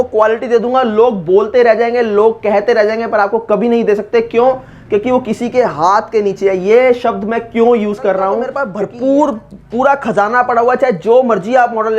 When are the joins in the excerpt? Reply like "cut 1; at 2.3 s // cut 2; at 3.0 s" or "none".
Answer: cut 1; at 8.6 s